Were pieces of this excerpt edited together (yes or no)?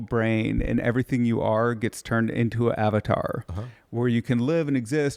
no